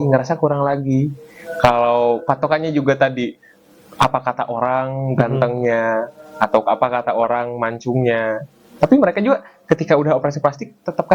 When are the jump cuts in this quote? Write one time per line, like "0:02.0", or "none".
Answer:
none